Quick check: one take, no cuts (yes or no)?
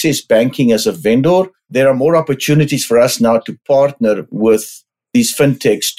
no